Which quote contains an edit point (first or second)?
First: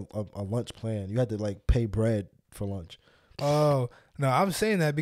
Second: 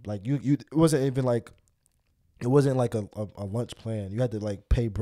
first